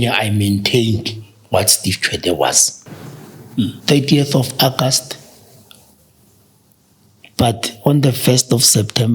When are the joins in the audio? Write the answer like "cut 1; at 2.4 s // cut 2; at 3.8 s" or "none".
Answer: cut 1; at 2.8 s